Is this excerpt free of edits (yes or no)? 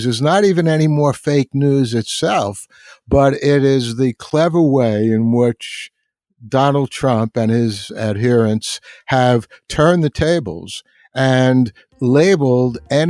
yes